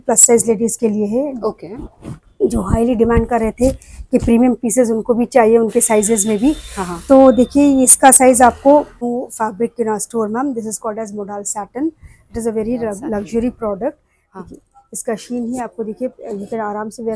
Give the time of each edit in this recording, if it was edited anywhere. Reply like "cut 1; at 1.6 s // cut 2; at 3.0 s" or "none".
cut 1; at 9.0 s